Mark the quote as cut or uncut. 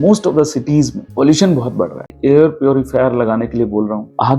cut